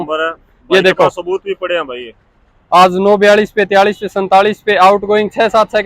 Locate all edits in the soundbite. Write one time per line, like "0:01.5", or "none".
none